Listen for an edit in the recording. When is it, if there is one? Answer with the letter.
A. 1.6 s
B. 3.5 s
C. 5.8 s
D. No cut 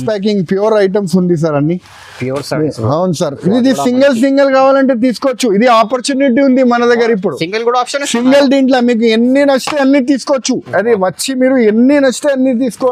D